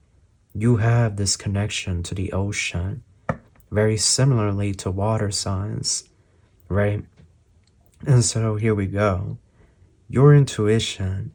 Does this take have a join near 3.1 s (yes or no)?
no